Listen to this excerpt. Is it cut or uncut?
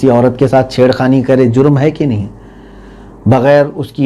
uncut